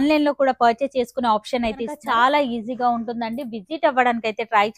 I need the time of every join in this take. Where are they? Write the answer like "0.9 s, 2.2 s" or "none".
2.0 s